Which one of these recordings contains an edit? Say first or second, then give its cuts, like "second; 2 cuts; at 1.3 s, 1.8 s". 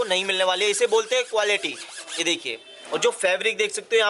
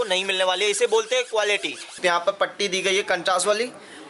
second; 1 cut; at 1.9 s